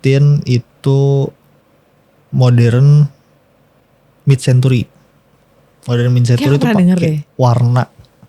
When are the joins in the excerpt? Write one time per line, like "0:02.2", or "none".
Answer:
none